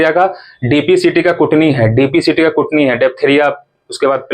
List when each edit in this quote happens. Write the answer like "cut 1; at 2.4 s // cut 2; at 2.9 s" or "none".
none